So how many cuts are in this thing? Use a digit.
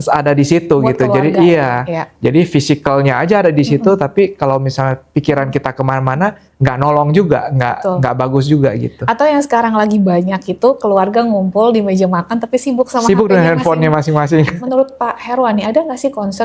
1